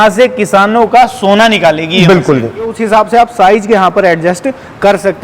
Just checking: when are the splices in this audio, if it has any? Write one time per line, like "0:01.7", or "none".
0:02.8